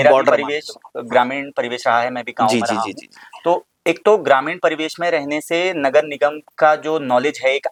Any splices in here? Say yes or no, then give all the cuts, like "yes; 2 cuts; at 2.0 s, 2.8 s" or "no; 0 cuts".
no; 0 cuts